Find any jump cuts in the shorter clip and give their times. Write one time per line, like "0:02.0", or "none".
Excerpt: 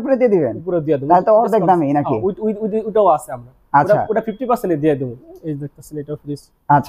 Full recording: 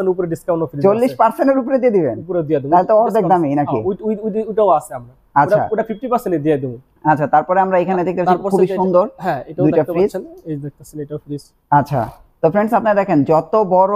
0:05.2